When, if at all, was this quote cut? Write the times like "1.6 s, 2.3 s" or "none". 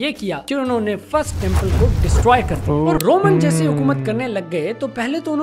3.0 s